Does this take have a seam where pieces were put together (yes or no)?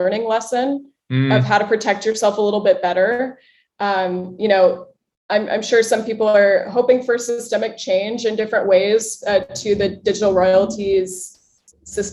no